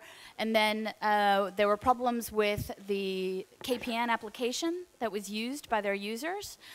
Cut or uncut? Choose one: cut